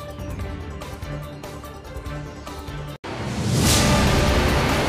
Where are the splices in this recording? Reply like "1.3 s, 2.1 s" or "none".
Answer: none